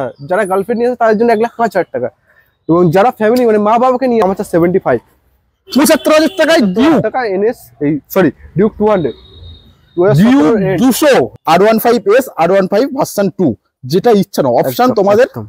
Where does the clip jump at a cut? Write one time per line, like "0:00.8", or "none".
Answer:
0:04.2
0:11.4